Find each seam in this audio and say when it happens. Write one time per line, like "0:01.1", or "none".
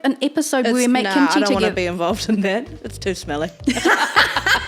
none